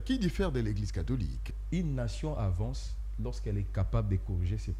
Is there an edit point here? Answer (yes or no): yes